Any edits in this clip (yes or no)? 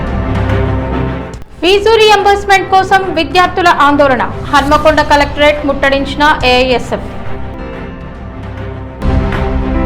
no